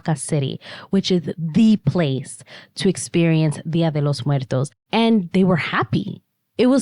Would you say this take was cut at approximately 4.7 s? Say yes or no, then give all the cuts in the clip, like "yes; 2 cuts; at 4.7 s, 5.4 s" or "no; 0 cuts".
yes; 1 cut; at 4.7 s